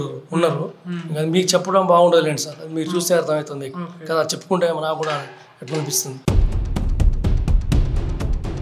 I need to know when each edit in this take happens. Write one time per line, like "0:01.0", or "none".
none